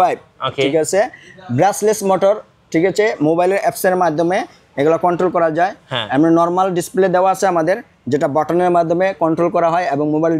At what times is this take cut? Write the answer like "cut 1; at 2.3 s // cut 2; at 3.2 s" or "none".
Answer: none